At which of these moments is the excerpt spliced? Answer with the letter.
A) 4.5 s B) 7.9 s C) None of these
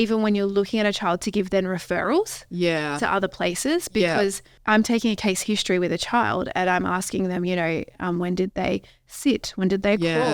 A